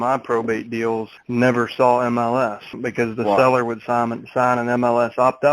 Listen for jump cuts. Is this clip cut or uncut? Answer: cut